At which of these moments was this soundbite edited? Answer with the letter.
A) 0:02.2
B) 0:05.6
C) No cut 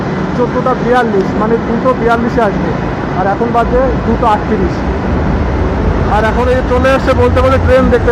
C